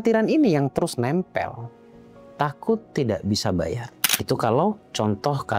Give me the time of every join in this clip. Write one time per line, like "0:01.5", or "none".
none

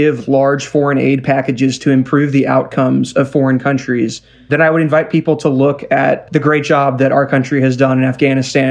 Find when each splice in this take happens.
0:04.5

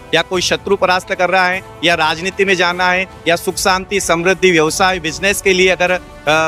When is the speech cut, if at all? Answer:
none

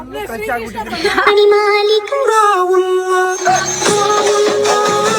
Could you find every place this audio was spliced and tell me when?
0:01.2

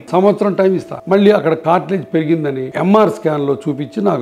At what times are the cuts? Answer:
0:00.9
0:02.7

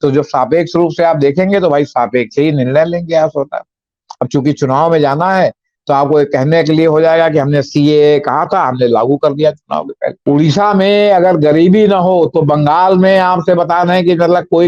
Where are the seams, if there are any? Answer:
0:10.2

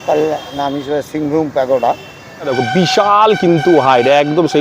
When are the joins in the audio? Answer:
0:02.5

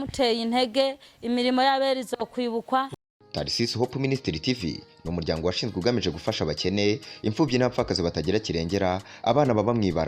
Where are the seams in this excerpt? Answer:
0:02.9

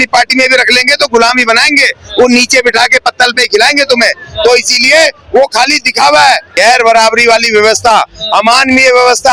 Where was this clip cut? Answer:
0:06.5

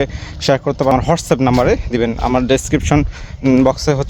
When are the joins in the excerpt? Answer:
0:00.9

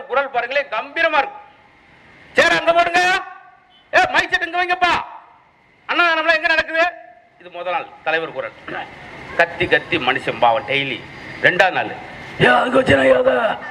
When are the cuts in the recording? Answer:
none

